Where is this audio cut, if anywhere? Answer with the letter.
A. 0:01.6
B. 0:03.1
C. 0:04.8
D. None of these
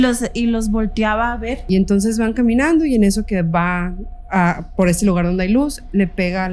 A